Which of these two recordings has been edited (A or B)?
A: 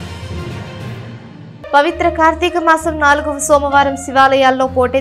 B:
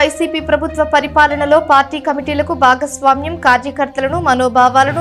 A